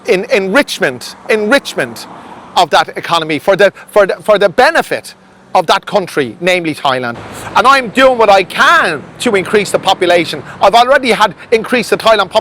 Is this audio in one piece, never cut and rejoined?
no; 1 cut; at 7.1 s

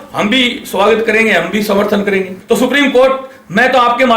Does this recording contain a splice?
yes; 1 cut; at 2.3 s

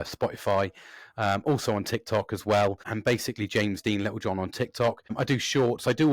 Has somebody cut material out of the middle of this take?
yes; 2 cuts; at 2.9 s, 5.1 s

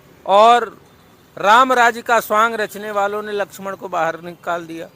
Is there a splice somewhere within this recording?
no; 0 cuts

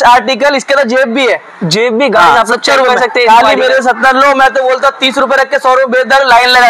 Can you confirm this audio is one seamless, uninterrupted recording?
yes; 0 cuts

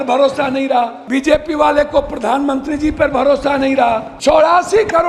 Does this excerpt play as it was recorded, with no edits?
no; 2 cuts; at 1.0 s, 4.1 s

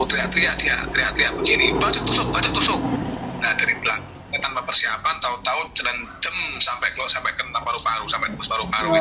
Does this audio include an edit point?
no; 0 cuts

